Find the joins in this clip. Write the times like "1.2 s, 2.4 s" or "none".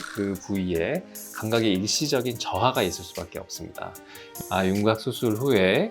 4.4 s